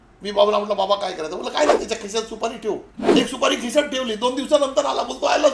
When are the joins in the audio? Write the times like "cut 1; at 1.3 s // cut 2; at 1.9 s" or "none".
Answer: cut 1; at 3.0 s